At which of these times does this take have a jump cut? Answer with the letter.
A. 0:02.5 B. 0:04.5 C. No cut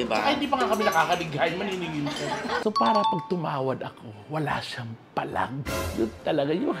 A